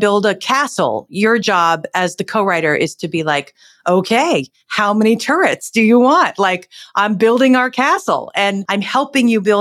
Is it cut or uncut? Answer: cut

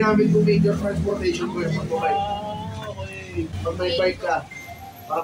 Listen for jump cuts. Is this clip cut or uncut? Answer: cut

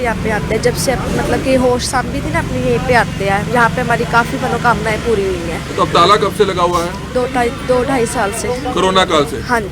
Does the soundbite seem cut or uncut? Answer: uncut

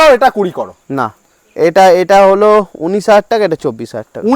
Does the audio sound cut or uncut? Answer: uncut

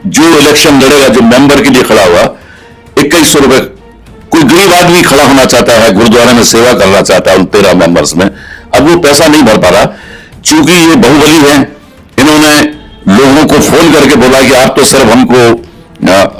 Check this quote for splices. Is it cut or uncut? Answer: uncut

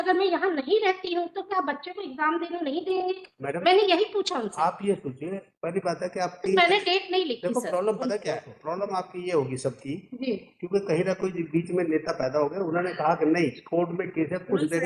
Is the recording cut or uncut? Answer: uncut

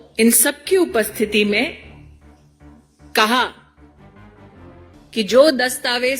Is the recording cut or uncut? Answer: cut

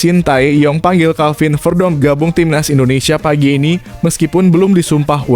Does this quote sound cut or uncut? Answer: uncut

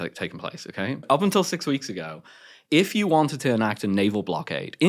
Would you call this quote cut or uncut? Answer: cut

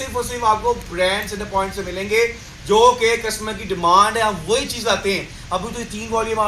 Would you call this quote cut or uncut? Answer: uncut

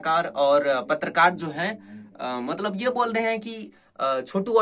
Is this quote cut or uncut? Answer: uncut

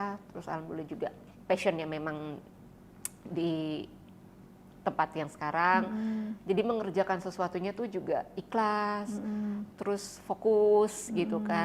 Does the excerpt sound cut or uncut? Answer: uncut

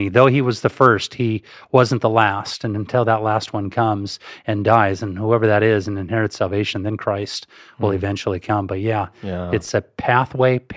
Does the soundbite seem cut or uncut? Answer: uncut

